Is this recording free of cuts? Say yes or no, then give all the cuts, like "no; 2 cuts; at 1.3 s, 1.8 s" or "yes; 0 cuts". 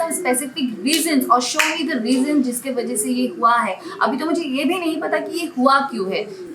yes; 0 cuts